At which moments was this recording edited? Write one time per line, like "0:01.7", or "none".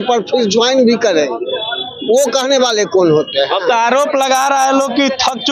none